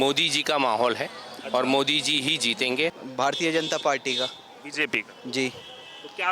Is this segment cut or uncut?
cut